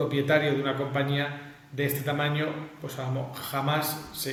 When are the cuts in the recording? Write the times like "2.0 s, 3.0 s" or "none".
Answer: none